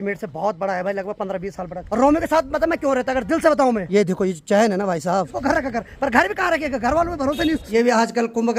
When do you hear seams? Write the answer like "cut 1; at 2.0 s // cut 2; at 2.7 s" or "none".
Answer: cut 1; at 1.8 s // cut 2; at 3.9 s // cut 3; at 5.3 s // cut 4; at 7.6 s